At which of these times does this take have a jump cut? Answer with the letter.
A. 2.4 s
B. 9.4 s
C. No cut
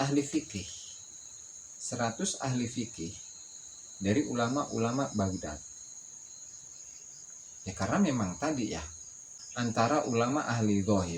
B